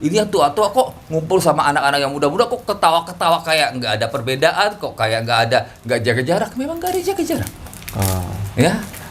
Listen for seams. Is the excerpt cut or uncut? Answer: uncut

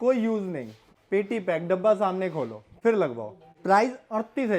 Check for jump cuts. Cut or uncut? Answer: cut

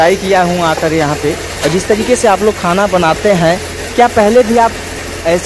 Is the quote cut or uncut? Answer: uncut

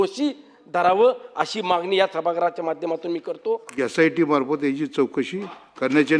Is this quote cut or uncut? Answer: cut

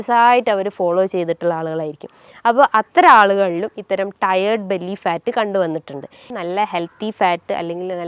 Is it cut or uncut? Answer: cut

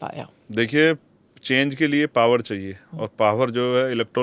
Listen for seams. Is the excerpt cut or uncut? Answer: uncut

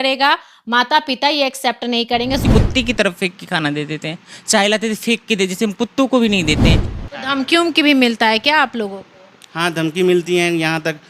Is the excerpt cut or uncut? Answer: cut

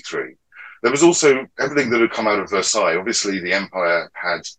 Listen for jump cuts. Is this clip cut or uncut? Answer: uncut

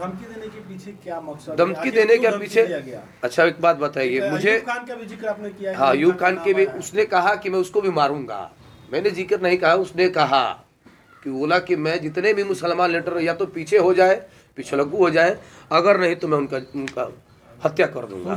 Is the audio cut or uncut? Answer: uncut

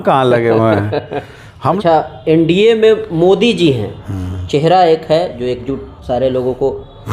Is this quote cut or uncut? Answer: cut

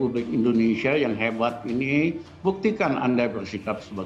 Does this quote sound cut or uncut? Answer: uncut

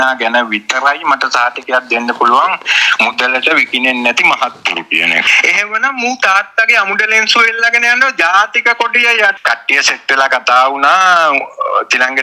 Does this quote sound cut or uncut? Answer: cut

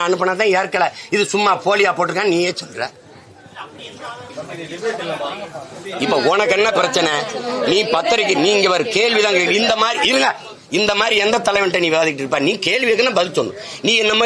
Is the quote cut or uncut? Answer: uncut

